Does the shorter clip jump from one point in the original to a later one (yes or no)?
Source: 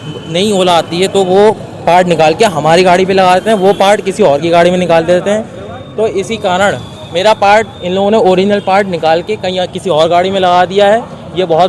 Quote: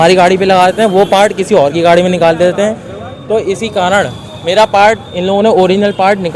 no